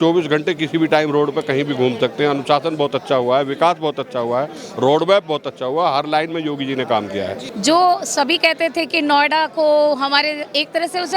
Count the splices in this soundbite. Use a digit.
1